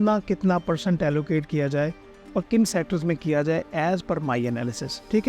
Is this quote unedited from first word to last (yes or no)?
yes